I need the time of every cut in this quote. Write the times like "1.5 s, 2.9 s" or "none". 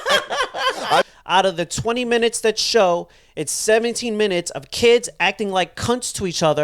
1.0 s